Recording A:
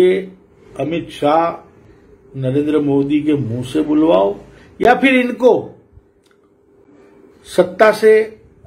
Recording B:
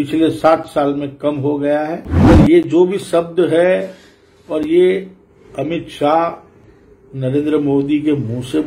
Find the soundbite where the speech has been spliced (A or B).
B